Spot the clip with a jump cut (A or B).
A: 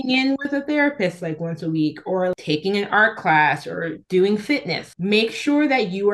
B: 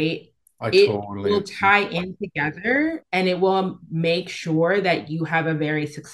A